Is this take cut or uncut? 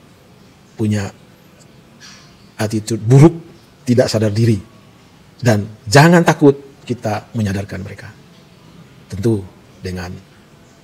uncut